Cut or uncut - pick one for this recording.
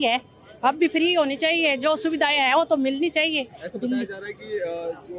uncut